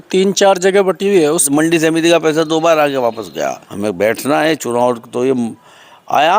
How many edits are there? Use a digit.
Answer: 2